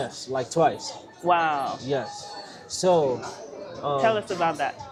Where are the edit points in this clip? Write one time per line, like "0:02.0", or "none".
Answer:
none